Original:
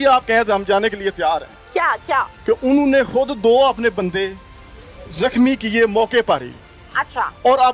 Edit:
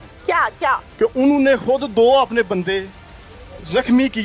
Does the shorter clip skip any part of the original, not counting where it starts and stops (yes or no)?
no